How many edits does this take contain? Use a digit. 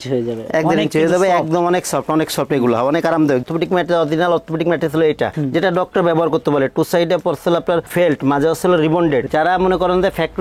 2